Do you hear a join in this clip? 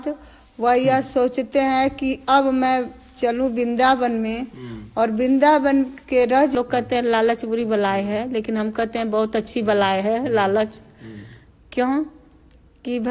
yes; 1 cut; at 6.5 s

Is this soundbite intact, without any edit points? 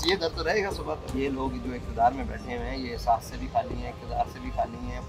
no; 1 cut; at 1.0 s

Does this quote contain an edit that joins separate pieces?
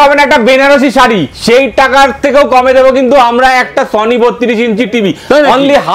no; 0 cuts

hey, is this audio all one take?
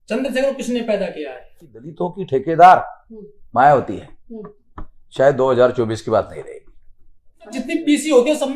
no; 2 cuts; at 1.9 s, 7.5 s

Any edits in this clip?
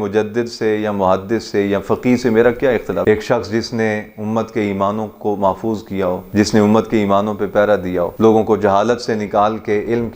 no; 0 cuts

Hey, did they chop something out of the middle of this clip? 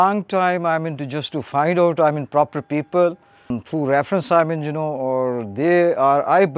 yes; 1 cut; at 3.5 s

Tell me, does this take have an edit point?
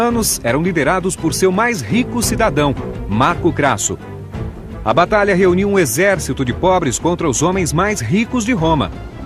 yes; 1 cut; at 6.1 s

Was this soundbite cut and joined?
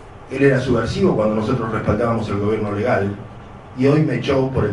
yes; 1 cut; at 2.0 s

